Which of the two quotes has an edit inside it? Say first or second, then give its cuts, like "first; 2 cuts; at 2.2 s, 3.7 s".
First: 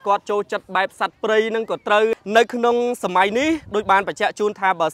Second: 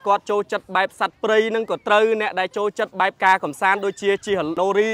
first; 1 cut; at 2.2 s